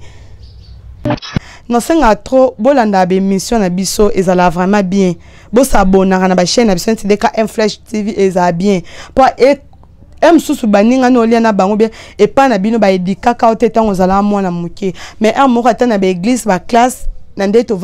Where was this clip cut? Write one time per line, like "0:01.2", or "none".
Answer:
0:01.2